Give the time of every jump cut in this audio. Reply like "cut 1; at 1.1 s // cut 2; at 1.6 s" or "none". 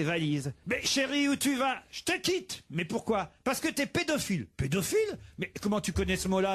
none